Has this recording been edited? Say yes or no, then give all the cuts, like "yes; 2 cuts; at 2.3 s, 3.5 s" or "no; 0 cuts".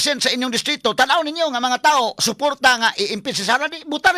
no; 0 cuts